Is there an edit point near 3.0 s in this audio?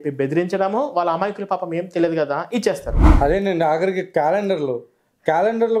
yes; 1 cut; at 3.0 s

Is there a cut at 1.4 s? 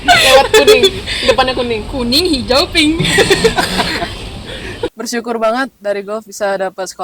no; 1 cut; at 4.8 s

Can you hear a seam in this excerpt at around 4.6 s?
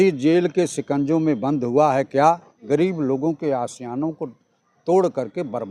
no; 1 cut; at 2.5 s

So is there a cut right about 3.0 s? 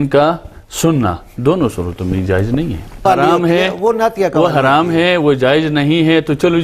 yes; 1 cut; at 3.0 s

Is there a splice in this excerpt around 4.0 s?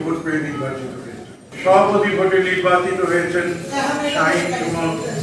no; 1 cut; at 1.5 s

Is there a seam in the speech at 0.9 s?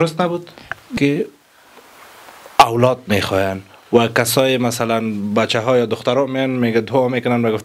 yes; 1 cut; at 0.9 s

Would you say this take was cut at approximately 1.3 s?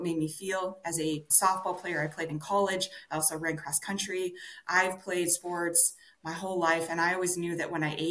yes; 1 cut; at 1.3 s

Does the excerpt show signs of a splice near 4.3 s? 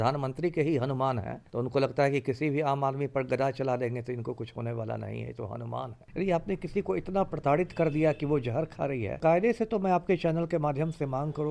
no; 3 cuts; at 1.4 s, 6.0 s, 9.2 s

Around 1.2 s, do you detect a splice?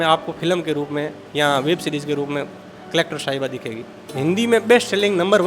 no; 1 cut; at 4.1 s

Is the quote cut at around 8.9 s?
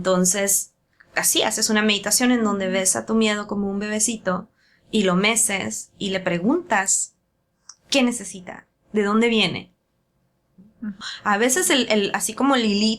no; 1 cut; at 11.0 s

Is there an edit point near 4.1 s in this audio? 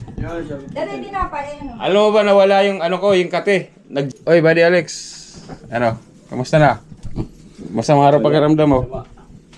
yes; 1 cut; at 4.1 s

